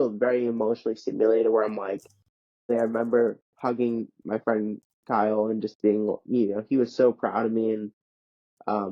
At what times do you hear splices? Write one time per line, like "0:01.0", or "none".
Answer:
0:02.7